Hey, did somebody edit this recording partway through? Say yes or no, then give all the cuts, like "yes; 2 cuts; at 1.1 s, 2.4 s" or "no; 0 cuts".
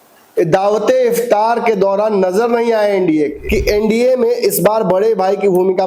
yes; 1 cut; at 3.4 s